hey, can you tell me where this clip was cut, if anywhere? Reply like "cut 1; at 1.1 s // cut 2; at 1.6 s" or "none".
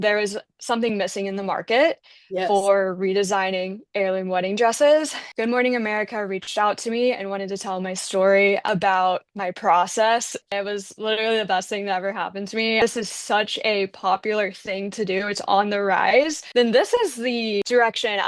cut 1; at 5.2 s // cut 2; at 8.7 s // cut 3; at 10.5 s // cut 4; at 12.8 s // cut 5; at 16.4 s